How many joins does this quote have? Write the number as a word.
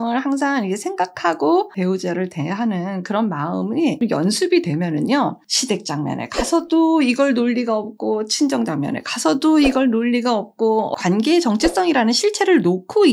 two